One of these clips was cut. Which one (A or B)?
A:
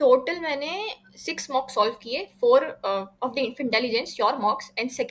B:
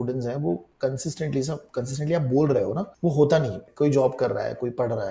B